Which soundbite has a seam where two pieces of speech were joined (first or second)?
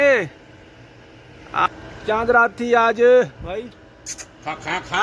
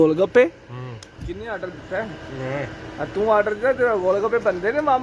first